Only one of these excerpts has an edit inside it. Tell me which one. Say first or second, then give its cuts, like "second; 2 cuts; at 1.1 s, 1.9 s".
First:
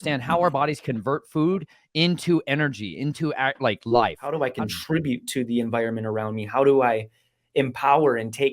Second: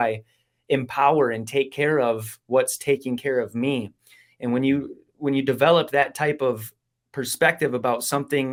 first; 1 cut; at 4.4 s